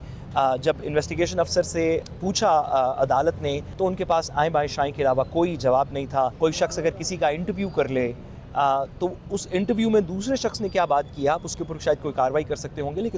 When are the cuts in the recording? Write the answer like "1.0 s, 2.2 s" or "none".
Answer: 2.0 s, 3.7 s, 6.3 s